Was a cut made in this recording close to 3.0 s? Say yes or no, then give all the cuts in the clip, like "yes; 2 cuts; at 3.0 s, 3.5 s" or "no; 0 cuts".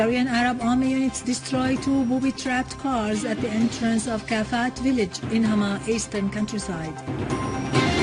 no; 1 cut; at 5.1 s